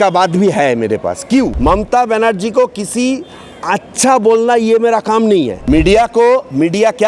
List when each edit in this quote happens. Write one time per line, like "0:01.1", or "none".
0:01.5
0:05.6